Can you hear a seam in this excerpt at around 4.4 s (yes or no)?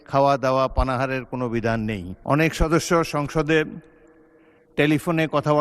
no